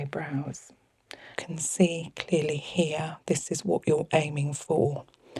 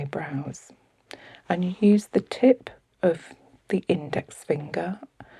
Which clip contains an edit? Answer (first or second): first